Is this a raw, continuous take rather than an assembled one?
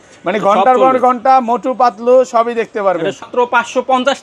no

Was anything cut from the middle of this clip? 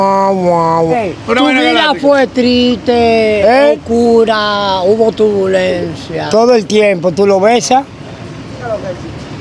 yes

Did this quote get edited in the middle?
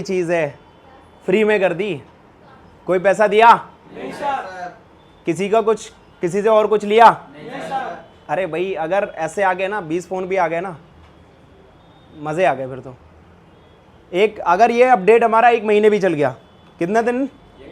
no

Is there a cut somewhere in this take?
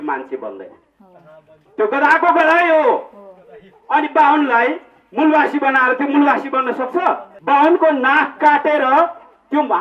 yes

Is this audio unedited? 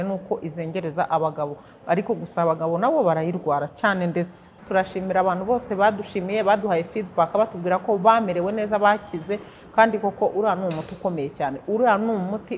no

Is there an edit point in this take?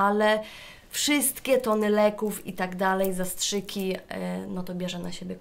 no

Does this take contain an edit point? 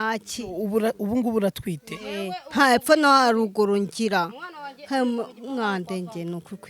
no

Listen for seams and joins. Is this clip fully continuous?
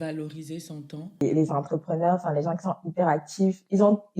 no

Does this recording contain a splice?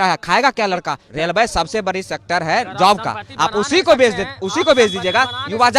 yes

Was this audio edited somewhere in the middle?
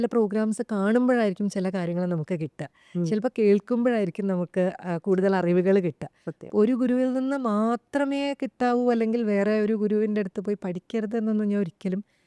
no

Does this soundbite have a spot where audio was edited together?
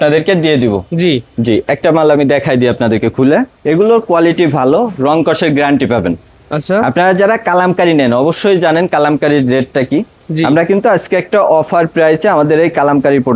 no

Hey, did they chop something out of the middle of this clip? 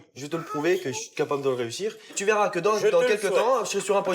yes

